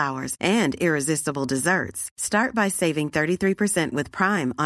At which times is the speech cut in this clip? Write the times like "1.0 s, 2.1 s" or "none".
none